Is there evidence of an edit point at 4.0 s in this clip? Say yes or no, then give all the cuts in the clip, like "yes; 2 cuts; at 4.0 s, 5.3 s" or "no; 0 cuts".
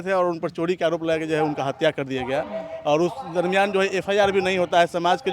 no; 0 cuts